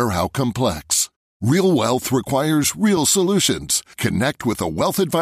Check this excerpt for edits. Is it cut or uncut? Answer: uncut